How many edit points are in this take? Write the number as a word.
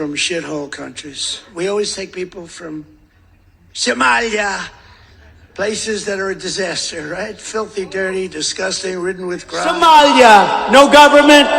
two